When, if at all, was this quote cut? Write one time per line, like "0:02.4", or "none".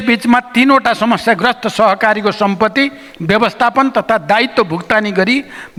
none